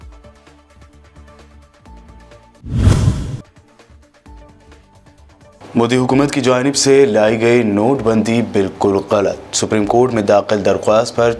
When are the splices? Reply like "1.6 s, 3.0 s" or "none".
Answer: 2.1 s

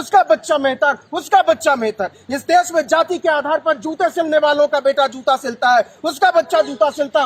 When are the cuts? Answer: none

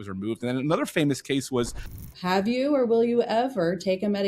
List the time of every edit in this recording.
1.8 s

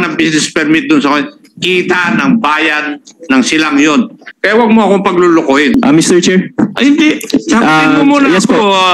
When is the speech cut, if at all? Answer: 4.3 s, 5.8 s

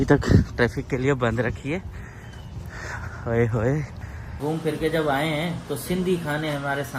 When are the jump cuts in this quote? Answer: 4.3 s

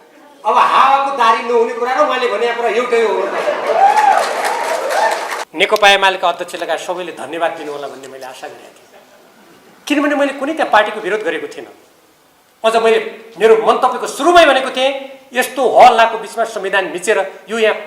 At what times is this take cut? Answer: 5.4 s

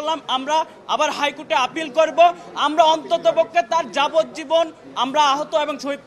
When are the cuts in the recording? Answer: none

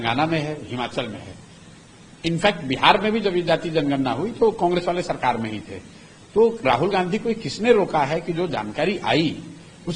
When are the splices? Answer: none

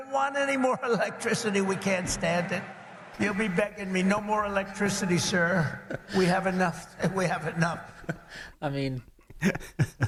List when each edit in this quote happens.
none

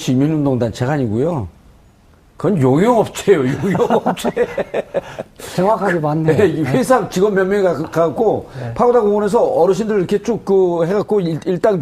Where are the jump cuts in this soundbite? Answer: 6.0 s

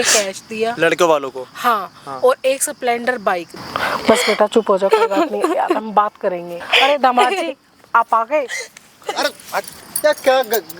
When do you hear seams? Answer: 3.6 s, 6.5 s

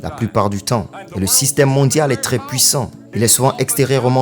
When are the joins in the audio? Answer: 3.0 s

